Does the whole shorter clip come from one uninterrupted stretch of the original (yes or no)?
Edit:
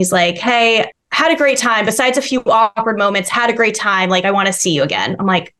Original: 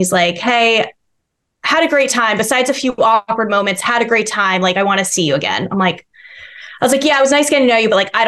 no